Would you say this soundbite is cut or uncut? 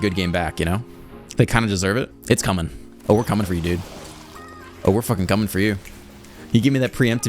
cut